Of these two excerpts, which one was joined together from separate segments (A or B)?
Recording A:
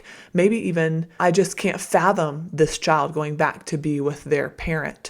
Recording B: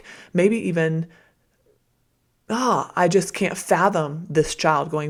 A